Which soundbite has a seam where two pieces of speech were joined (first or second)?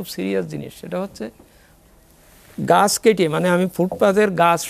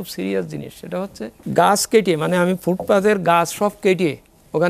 second